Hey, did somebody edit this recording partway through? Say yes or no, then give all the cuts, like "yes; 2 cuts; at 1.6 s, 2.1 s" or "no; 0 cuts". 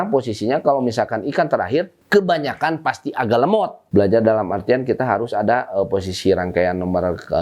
yes; 2 cuts; at 2.0 s, 3.8 s